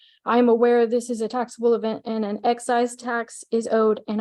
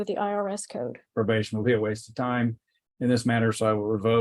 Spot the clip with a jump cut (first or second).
second